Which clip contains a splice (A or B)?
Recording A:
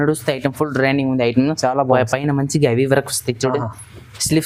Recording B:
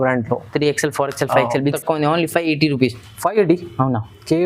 B